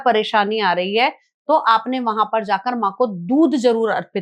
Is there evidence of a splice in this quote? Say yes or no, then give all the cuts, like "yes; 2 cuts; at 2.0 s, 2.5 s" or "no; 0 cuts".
no; 0 cuts